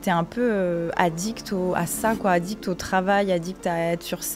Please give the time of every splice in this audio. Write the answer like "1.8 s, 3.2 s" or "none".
none